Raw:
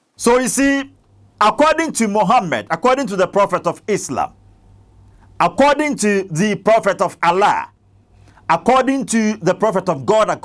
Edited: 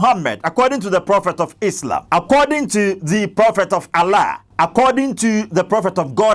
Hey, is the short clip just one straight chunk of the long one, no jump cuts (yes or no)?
no